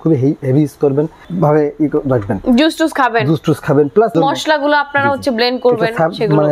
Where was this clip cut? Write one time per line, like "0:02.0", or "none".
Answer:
none

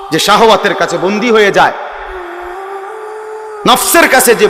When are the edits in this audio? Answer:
0:02.0
0:03.6

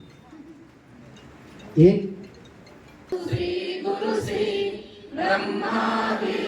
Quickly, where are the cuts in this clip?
0:03.1

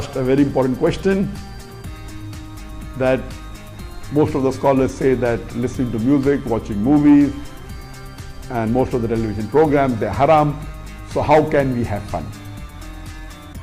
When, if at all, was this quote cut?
none

